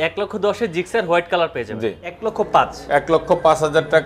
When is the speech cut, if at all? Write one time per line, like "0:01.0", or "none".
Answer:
0:02.2

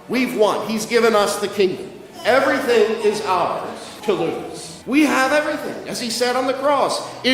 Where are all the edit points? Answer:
0:03.9
0:04.7

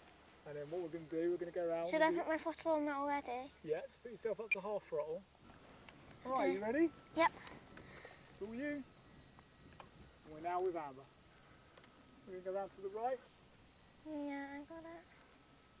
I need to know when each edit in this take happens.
0:05.4

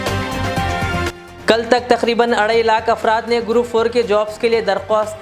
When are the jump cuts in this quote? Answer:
0:01.0

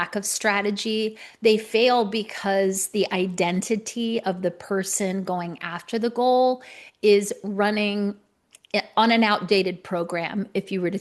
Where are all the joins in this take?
none

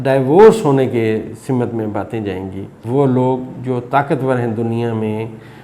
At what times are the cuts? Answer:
0:02.7

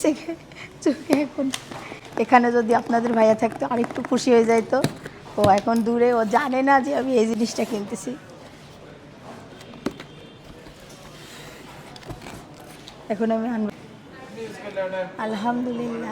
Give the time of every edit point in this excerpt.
0:13.9

